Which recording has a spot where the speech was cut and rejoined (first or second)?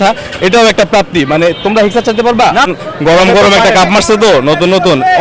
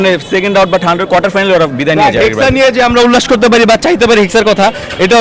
first